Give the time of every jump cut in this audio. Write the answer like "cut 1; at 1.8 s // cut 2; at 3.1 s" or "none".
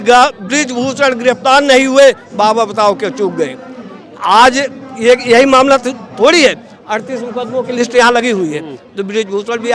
none